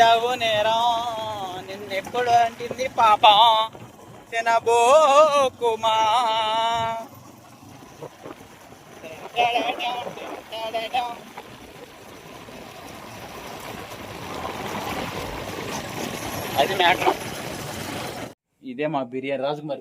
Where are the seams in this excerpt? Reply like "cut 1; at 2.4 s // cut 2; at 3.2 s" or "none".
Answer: cut 1; at 18.5 s